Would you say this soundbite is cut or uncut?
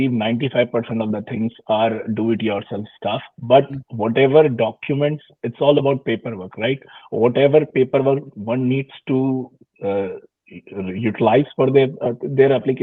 uncut